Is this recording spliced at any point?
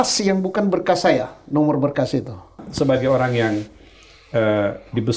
yes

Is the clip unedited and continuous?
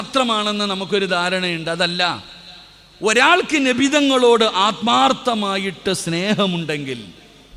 yes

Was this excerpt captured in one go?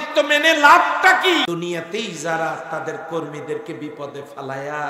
no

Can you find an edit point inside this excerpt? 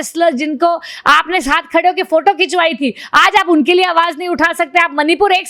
no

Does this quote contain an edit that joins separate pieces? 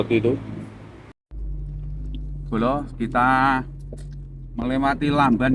yes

